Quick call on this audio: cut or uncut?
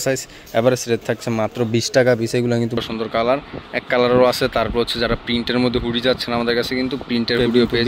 cut